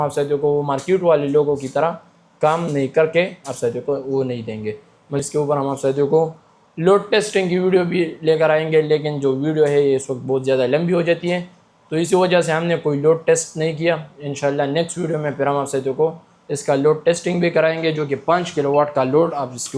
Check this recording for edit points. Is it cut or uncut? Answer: cut